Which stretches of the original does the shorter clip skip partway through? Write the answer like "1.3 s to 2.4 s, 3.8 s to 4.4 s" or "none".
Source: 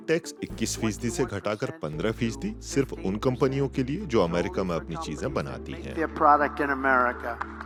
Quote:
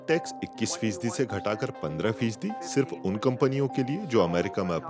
none